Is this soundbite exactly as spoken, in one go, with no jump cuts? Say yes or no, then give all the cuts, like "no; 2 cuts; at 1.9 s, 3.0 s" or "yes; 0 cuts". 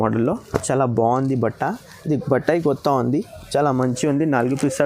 yes; 0 cuts